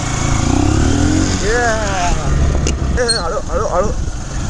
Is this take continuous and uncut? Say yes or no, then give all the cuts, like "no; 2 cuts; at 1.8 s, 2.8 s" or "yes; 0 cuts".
no; 1 cut; at 3.0 s